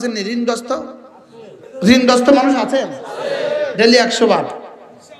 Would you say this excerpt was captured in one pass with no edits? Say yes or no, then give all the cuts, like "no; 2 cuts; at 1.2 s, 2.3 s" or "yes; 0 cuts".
no; 1 cut; at 1.6 s